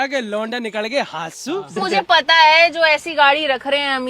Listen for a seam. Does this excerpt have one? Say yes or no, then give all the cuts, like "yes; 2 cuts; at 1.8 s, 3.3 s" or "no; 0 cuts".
yes; 1 cut; at 1.8 s